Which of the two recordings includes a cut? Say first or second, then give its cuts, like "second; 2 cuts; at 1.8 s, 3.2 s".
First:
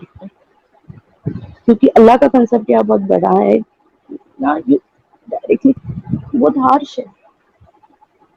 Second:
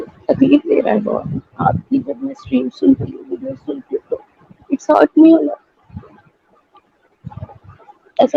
first; 1 cut; at 5.8 s